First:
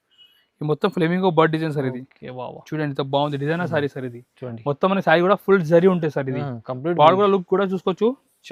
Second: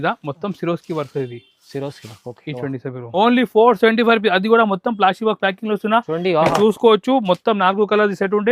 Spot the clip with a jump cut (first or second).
second